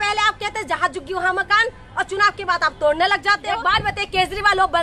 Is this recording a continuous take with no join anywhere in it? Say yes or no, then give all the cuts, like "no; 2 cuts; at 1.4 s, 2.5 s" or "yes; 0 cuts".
no; 1 cut; at 3.5 s